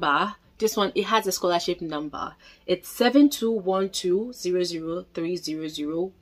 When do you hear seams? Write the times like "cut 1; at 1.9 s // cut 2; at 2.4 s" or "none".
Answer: none